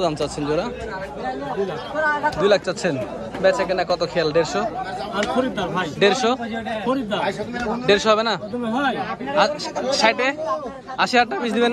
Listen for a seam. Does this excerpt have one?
no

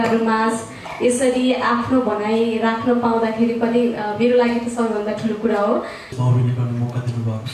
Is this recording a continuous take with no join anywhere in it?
no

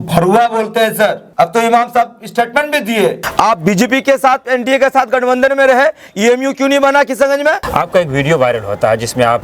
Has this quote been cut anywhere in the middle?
yes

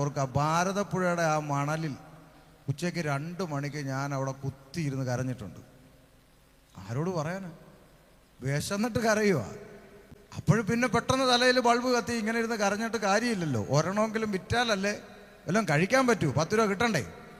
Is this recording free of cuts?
yes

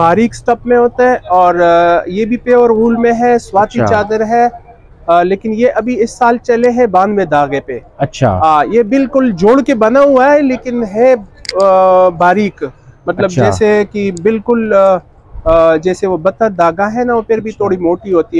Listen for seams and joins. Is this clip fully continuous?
yes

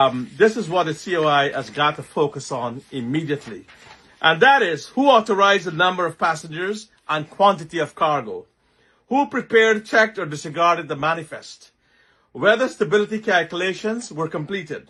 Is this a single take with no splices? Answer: yes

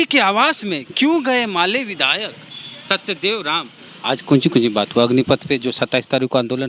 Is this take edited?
yes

